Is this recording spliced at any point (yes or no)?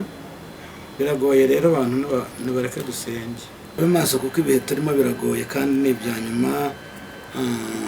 yes